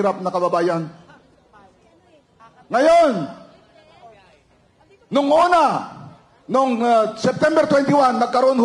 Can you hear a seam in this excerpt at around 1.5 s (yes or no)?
no